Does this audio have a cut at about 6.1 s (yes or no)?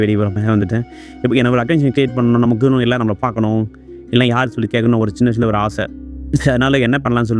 no